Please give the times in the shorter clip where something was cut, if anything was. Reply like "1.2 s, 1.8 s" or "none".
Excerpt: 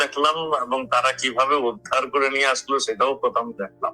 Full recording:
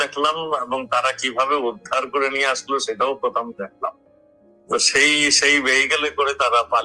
none